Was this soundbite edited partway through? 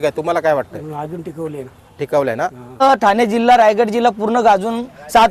yes; 1 cut; at 2.8 s

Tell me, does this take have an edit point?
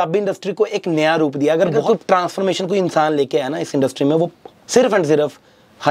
yes; 1 cut; at 1.8 s

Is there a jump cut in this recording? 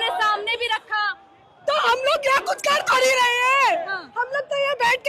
no; 0 cuts

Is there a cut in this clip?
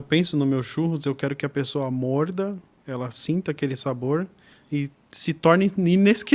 no; 0 cuts

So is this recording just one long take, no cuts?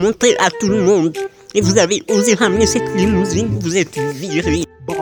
yes; 0 cuts

